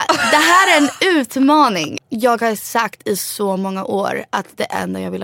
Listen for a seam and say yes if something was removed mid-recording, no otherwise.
yes